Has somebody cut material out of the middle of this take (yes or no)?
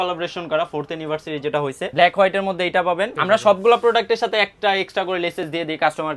yes